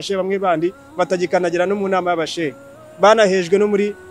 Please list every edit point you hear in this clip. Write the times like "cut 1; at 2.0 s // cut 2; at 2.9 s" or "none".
none